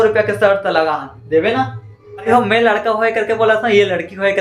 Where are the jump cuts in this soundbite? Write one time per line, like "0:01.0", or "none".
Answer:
0:02.3